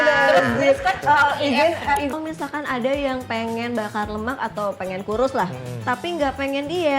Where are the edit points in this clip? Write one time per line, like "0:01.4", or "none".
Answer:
0:02.1